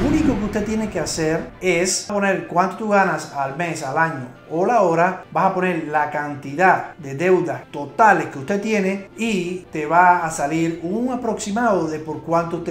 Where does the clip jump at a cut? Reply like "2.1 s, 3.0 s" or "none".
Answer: none